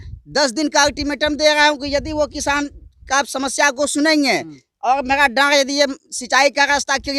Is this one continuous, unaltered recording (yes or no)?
yes